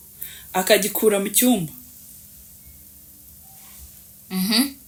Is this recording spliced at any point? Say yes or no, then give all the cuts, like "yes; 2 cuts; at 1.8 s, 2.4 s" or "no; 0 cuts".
no; 0 cuts